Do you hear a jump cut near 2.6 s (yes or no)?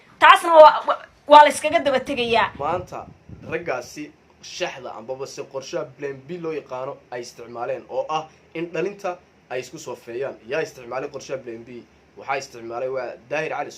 yes